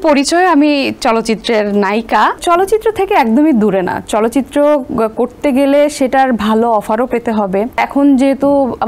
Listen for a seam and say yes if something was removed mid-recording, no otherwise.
yes